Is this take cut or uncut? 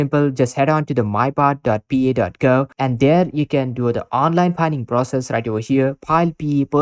uncut